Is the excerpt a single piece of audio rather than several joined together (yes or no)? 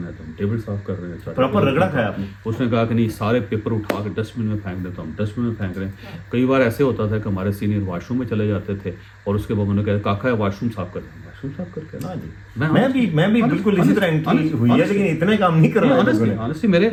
yes